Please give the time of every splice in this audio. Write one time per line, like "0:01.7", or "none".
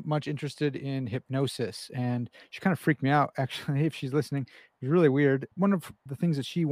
0:05.6

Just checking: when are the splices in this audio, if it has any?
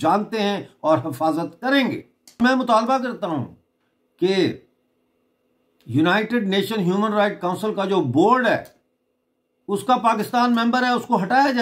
0:02.4

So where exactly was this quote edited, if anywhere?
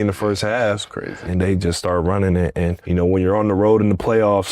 0:01.2
0:02.8

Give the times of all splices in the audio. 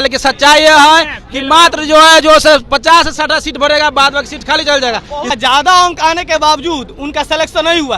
0:05.3

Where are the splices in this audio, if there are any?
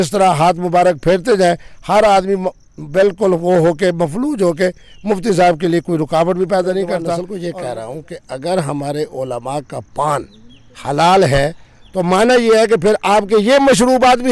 0:07.3

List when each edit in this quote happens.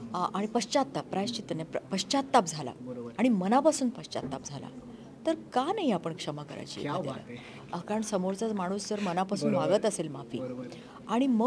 none

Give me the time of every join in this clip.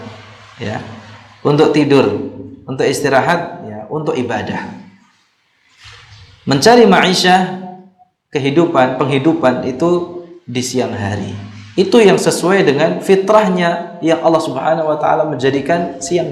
none

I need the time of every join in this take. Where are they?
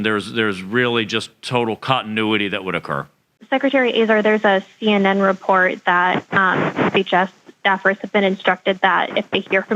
0:03.3

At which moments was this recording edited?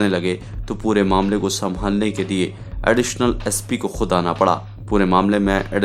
none

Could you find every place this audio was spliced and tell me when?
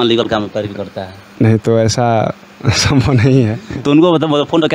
none

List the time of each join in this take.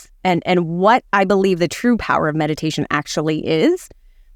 none

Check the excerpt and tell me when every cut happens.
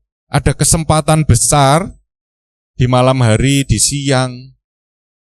none

